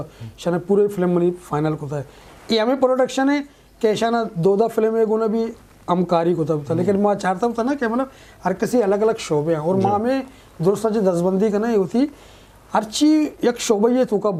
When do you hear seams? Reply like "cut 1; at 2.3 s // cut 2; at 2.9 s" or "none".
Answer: none